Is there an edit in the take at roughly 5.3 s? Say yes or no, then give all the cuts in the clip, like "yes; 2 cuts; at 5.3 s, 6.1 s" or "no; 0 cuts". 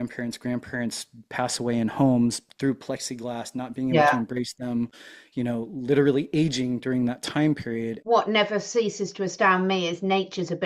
no; 1 cut; at 8.0 s